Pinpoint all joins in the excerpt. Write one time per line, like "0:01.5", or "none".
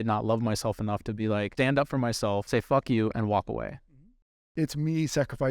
0:01.5
0:02.5
0:04.4